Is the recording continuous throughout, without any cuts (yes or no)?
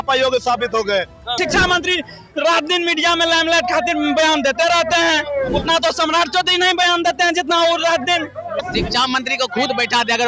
no